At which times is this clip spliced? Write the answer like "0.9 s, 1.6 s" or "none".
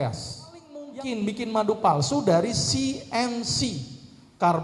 0.9 s